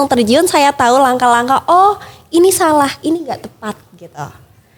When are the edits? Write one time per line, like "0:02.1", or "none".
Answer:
none